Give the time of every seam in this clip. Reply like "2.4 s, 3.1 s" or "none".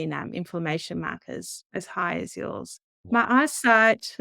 1.6 s, 3.0 s